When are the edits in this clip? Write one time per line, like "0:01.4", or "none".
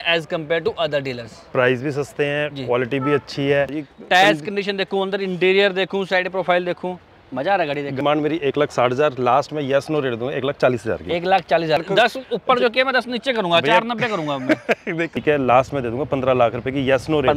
0:03.8
0:08.0
0:11.8
0:15.2